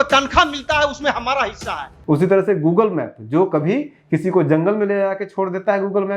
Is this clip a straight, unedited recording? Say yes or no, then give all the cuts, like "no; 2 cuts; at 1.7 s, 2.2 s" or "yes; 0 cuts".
no; 1 cut; at 1.9 s